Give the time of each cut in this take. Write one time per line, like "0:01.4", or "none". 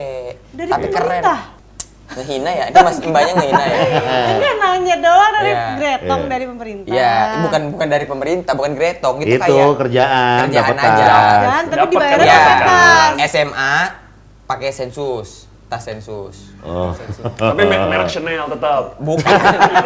none